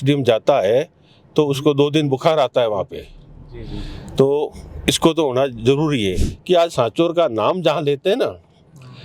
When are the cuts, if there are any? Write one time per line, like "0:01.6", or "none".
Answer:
0:06.3